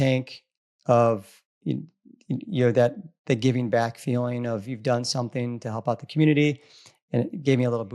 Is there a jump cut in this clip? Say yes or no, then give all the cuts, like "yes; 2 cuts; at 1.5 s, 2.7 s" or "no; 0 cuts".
no; 0 cuts